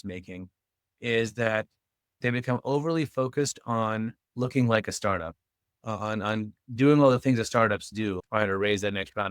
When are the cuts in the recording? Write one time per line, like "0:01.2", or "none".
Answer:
0:02.2